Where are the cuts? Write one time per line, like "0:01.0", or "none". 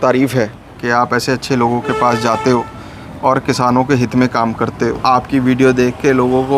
0:05.0